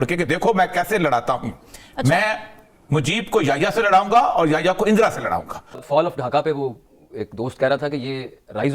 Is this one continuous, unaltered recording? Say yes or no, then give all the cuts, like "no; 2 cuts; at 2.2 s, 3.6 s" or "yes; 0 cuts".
no; 1 cut; at 5.6 s